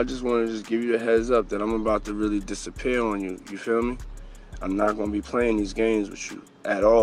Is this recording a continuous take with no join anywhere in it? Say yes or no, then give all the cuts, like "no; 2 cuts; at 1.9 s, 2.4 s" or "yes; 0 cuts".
yes; 0 cuts